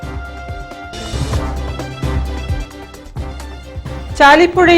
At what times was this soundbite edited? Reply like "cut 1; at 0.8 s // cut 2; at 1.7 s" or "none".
cut 1; at 3.8 s